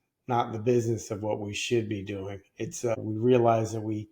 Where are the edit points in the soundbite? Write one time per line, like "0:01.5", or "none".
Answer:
0:02.9

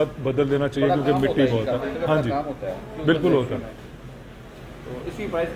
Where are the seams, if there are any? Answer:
none

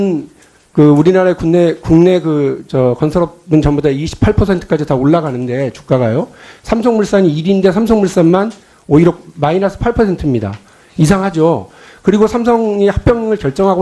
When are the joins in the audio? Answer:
0:03.5

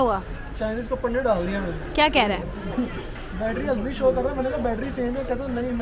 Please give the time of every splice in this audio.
none

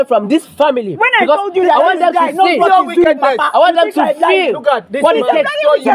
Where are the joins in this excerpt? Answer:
none

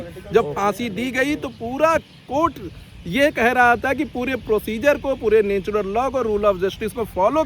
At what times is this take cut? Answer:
none

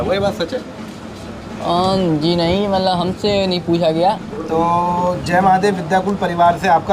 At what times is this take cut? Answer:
0:04.3

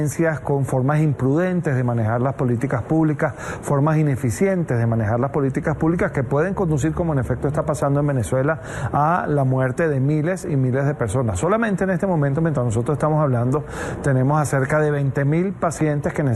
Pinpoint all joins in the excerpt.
none

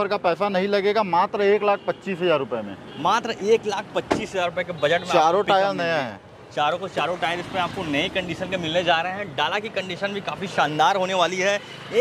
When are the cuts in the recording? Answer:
none

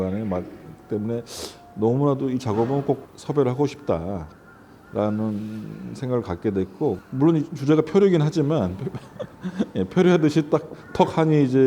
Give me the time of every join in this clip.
0:07.0

